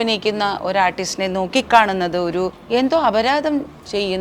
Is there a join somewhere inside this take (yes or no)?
yes